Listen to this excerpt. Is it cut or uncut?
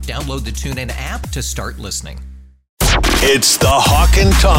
cut